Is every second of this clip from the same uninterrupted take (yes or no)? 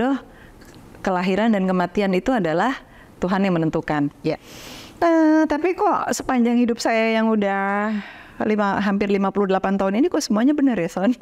yes